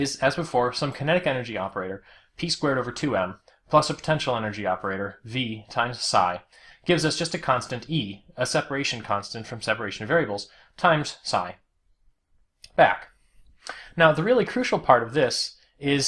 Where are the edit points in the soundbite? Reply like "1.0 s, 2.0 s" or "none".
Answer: none